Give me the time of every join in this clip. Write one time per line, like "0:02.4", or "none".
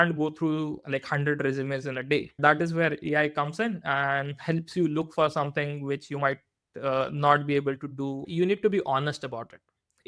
0:02.4
0:08.2